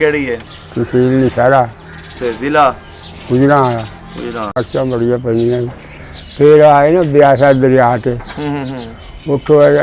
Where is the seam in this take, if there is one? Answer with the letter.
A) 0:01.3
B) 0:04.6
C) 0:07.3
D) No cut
B